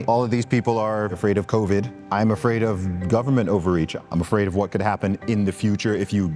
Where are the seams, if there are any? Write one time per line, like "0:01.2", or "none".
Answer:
0:01.2
0:02.0
0:03.9